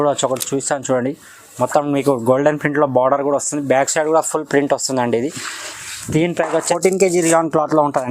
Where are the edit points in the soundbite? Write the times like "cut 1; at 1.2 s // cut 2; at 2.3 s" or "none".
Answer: cut 1; at 6.6 s